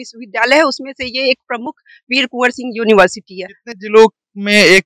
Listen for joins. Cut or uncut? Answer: uncut